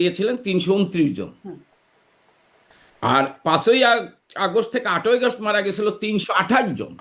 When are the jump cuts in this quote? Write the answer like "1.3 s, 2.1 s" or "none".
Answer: none